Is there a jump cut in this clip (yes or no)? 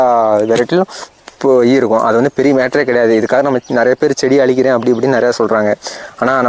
no